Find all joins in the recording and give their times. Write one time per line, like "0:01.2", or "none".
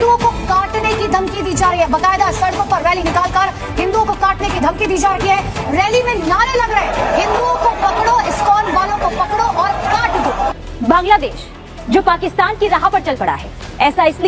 0:10.6